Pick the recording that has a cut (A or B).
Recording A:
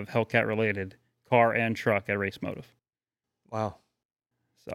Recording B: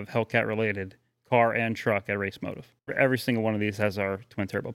B